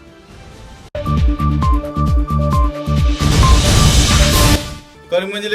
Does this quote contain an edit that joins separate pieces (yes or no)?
yes